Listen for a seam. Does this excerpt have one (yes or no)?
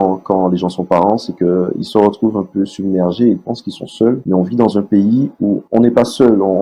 no